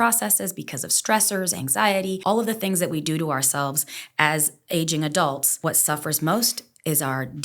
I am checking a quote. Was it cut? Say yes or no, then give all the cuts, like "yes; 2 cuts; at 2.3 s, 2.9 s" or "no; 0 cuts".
yes; 2 cuts; at 2.2 s, 5.5 s